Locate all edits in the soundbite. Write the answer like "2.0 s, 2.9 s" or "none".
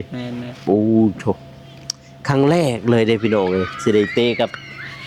none